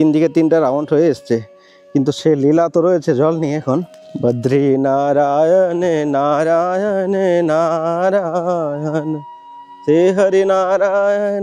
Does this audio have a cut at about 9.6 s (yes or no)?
no